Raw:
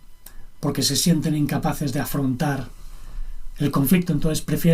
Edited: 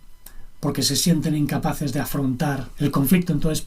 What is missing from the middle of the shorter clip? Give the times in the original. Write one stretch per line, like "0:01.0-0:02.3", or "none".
0:02.7-0:03.5